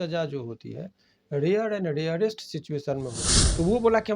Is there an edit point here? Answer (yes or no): yes